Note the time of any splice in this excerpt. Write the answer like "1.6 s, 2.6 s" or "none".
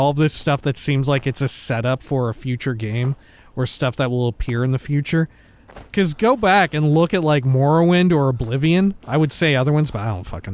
9.0 s